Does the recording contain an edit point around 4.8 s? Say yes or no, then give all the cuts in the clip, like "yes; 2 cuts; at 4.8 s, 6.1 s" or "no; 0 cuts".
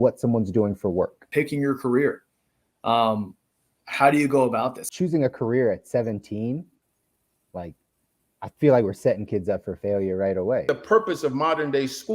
yes; 3 cuts; at 1.3 s, 4.8 s, 10.7 s